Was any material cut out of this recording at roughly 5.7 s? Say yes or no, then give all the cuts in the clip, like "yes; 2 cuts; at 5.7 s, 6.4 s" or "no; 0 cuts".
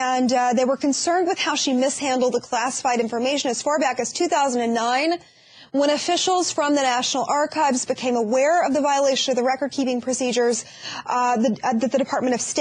no; 0 cuts